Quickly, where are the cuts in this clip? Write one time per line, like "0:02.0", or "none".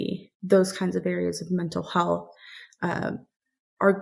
none